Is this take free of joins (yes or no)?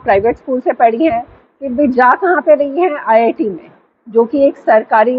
yes